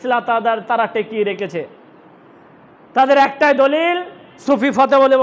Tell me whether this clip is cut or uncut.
uncut